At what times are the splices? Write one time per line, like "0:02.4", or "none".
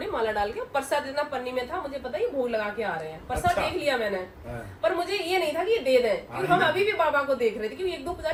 none